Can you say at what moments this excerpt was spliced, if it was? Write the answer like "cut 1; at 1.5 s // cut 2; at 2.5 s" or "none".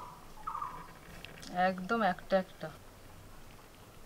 cut 1; at 1.3 s // cut 2; at 2.5 s